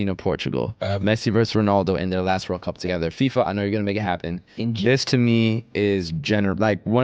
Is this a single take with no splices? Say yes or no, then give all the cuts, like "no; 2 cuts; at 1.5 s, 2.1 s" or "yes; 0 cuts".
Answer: yes; 0 cuts